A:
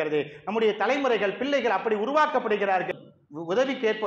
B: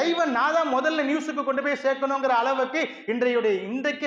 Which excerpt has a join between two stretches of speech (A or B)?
A